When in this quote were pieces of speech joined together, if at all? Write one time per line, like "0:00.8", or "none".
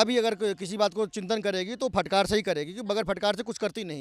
none